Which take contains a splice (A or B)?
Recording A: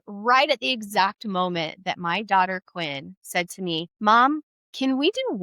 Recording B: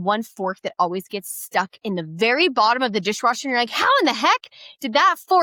A